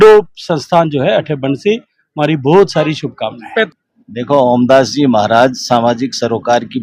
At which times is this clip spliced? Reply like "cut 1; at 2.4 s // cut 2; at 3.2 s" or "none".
cut 1; at 3.7 s